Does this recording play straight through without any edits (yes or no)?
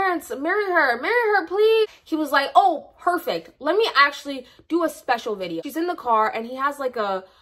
no